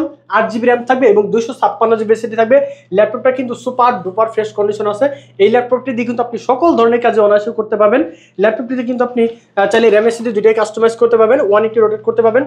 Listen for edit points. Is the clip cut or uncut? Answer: uncut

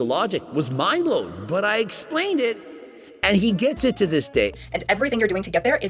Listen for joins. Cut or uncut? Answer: cut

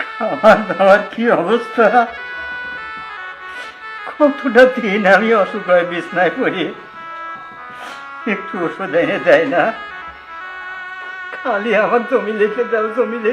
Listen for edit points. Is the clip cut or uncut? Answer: uncut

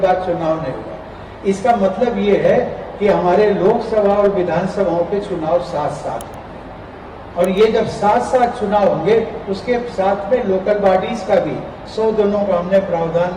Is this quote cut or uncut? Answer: uncut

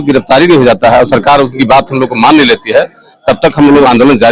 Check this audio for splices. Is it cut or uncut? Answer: uncut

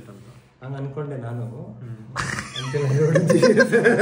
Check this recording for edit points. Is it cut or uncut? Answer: uncut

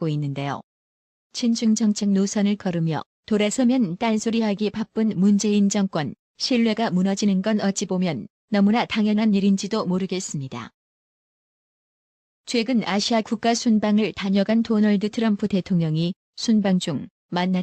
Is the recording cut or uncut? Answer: cut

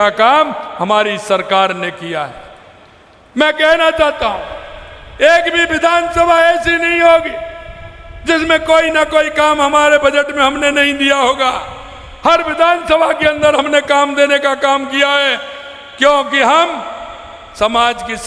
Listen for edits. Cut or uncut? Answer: uncut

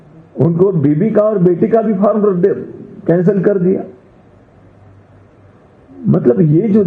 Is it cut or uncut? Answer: uncut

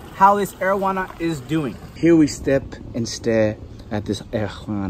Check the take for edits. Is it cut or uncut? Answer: cut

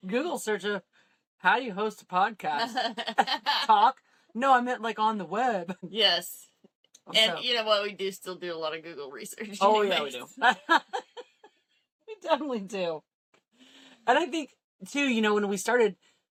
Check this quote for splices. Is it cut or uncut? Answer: uncut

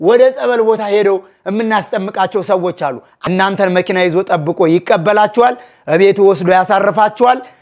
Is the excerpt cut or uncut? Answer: cut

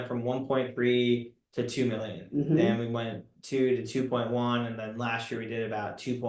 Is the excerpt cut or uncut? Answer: uncut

